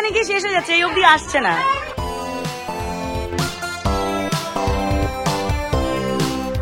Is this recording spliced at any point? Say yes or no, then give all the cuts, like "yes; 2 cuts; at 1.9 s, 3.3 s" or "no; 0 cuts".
no; 0 cuts